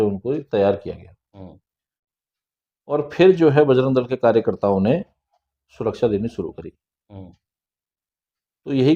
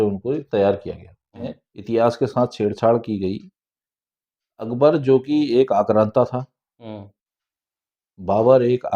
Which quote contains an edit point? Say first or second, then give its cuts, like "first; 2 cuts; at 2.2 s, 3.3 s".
second; 1 cut; at 1.7 s